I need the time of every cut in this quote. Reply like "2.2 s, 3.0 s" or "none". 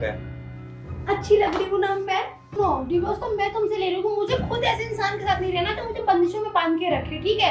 2.6 s